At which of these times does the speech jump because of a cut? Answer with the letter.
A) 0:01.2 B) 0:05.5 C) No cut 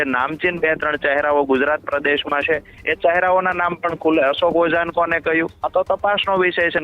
B